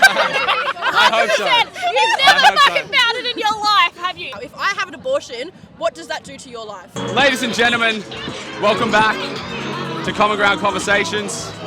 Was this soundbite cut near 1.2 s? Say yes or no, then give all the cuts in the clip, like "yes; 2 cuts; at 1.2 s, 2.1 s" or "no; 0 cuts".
no; 2 cuts; at 4.3 s, 7.0 s